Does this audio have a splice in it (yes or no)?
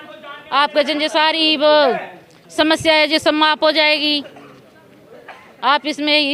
no